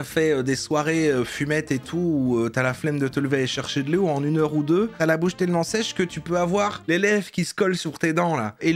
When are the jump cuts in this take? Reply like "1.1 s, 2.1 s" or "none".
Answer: none